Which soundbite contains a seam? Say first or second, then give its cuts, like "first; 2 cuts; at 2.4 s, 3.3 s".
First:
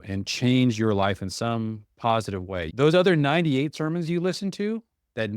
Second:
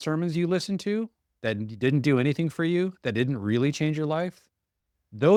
first; 1 cut; at 2.7 s